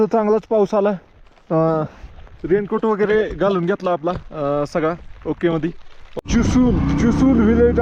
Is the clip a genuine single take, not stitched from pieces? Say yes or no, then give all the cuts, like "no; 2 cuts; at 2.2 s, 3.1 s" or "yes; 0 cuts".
no; 1 cut; at 6.2 s